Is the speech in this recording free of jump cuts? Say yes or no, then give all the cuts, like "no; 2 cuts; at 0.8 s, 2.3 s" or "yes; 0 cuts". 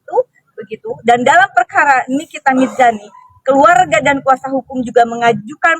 no; 1 cut; at 4.5 s